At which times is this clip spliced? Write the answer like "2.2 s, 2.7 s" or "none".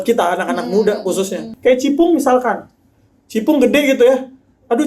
1.5 s